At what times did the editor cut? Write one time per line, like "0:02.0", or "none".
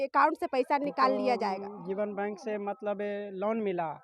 0:01.7